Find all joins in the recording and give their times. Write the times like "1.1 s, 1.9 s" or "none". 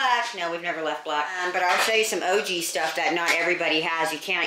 1.3 s